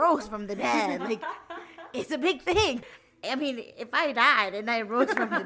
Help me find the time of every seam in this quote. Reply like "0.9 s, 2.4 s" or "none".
2.8 s